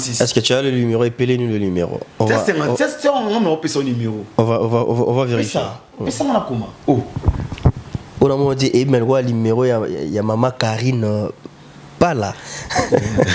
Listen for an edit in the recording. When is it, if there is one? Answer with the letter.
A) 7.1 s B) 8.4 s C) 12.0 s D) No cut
D